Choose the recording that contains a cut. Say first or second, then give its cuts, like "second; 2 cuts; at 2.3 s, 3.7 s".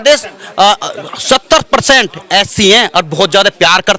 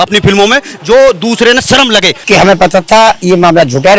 second; 1 cut; at 2.1 s